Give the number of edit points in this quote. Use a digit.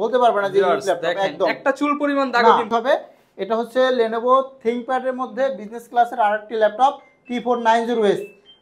1